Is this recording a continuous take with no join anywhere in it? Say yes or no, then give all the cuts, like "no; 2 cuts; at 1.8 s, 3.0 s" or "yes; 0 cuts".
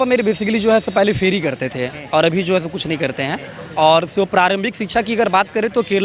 yes; 0 cuts